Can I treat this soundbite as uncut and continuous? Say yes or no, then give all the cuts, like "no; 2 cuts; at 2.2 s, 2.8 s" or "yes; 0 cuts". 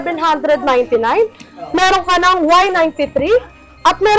yes; 0 cuts